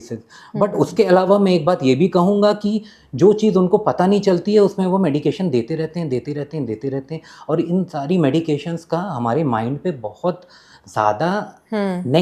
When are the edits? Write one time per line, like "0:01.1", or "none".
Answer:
none